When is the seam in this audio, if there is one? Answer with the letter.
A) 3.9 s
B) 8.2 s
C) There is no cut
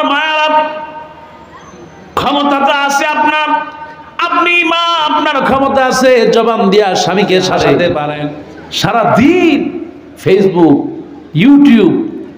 B